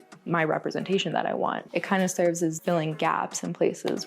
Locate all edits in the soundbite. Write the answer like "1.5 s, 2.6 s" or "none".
1.6 s

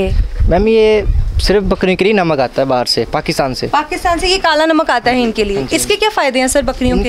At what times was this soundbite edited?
3.6 s

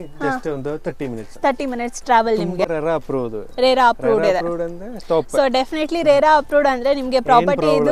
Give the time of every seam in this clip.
2.6 s

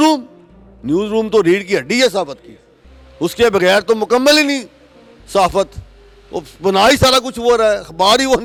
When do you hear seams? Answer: none

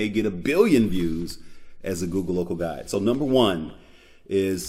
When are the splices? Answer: none

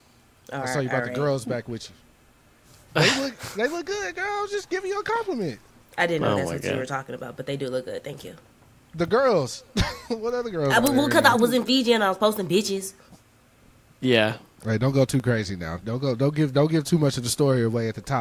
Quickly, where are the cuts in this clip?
none

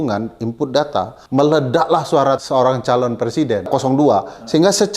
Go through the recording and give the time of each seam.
1.2 s, 2.4 s, 3.7 s

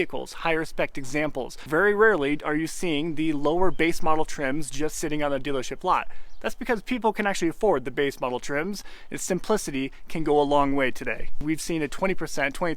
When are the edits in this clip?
1.6 s, 11.4 s

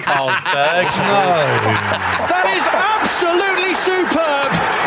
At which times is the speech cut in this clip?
1.7 s

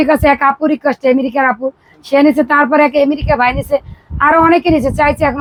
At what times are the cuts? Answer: none

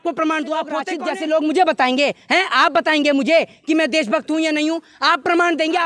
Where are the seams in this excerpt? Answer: 0.9 s

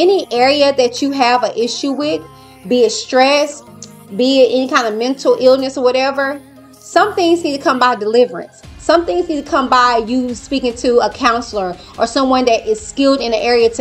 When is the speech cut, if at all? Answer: none

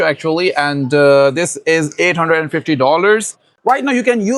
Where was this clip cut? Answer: 3.5 s

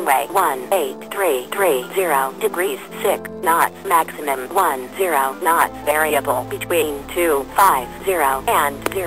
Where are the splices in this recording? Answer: none

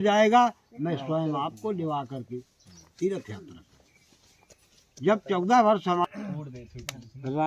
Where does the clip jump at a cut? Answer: 6.0 s

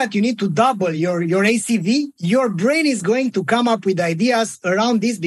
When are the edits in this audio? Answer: 1.0 s, 2.2 s

